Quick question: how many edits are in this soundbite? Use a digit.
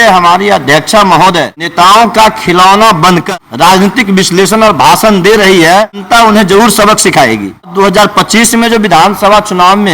4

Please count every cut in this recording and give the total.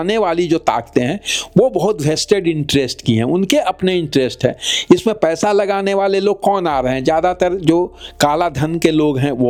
0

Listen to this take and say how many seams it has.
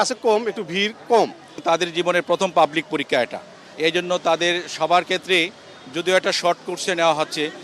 1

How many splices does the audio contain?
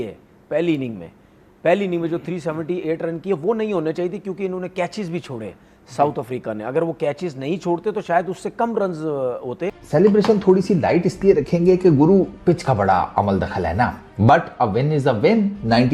1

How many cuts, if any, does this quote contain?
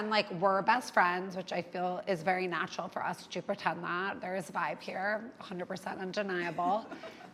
0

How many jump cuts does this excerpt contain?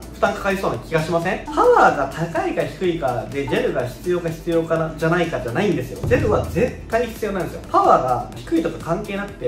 2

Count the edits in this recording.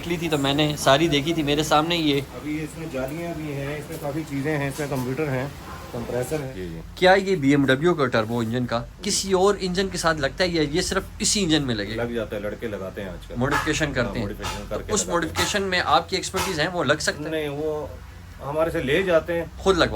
1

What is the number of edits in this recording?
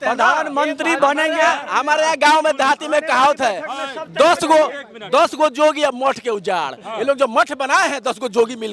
0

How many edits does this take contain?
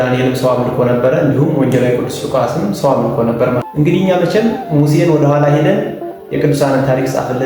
1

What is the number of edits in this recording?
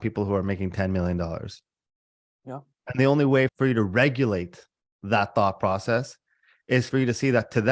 2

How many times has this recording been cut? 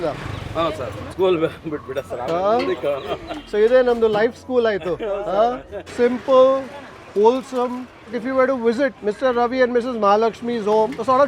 2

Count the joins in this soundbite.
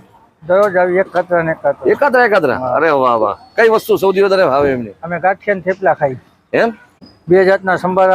1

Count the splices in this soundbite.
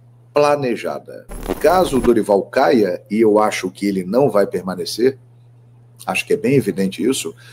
1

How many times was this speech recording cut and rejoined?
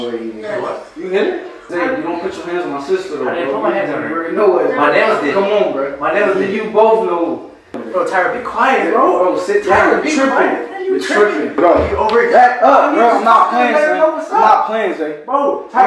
3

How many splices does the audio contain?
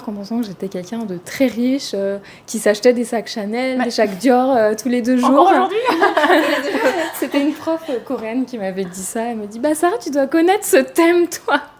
0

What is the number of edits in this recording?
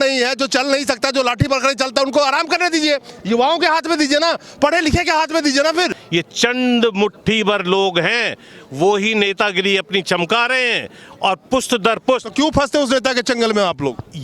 1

